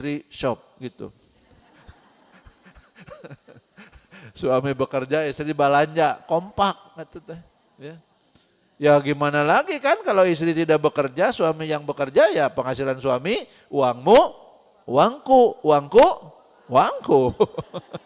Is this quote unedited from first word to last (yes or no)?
yes